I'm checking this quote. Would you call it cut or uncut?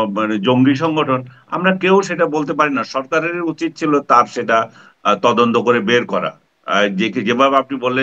uncut